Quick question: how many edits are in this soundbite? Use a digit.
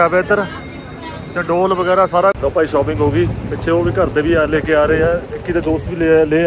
1